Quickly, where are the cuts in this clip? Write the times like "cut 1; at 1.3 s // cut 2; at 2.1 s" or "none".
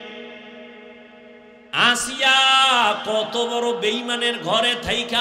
none